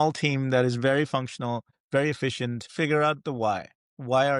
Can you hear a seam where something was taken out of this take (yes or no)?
yes